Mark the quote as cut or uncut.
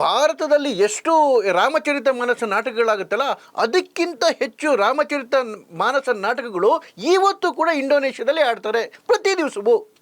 cut